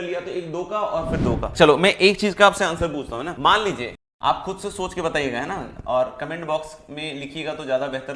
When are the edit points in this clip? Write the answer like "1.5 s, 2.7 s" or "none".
1.5 s, 3.3 s, 4.0 s